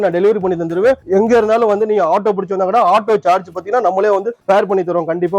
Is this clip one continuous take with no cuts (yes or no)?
no